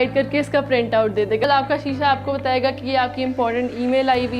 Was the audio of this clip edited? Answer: yes; 1 cut; at 1.4 s

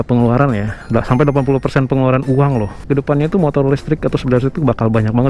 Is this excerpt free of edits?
no; 1 cut; at 2.8 s

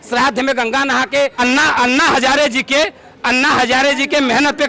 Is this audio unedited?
no; 1 cut; at 1.3 s

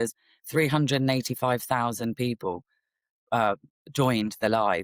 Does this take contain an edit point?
no; 0 cuts

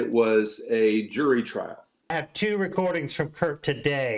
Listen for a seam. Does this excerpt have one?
yes; 1 cut; at 2.1 s

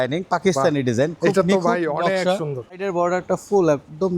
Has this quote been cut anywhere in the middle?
yes; 1 cut; at 2.9 s

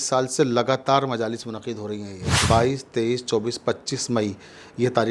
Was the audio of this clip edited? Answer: yes; 1 cut; at 2.4 s

